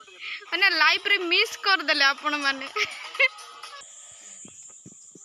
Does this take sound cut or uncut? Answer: cut